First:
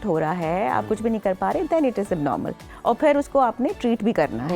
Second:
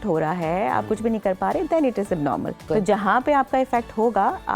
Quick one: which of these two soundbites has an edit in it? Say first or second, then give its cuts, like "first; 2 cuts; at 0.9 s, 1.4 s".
second; 1 cut; at 2.6 s